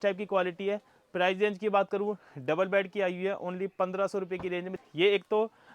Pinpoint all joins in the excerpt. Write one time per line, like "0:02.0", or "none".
0:04.7